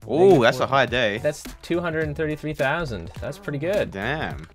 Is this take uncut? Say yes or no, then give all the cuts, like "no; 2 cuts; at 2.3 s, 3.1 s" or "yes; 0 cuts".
yes; 0 cuts